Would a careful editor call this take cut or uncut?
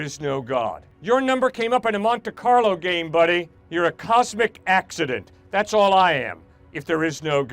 cut